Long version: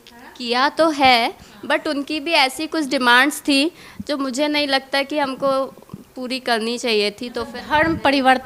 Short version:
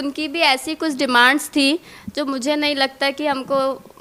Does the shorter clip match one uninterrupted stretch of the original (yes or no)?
yes